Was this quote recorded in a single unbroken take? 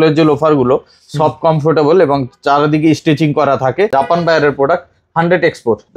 no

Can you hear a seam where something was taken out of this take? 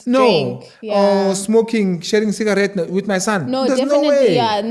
no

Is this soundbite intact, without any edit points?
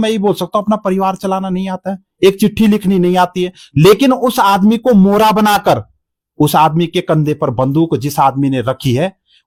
yes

